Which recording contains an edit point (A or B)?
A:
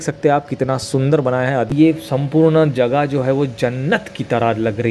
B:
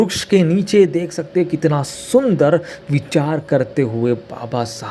A